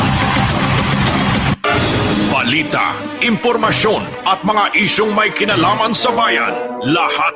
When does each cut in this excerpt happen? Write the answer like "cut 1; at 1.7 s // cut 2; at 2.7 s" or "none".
cut 1; at 1.5 s